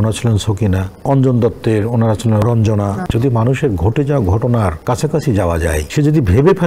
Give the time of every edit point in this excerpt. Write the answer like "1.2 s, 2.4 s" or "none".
0.9 s, 3.0 s, 4.8 s, 5.9 s